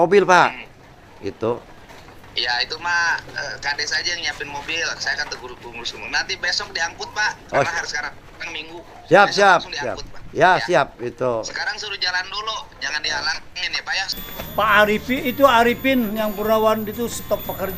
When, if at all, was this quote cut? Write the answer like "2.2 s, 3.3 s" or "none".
14.1 s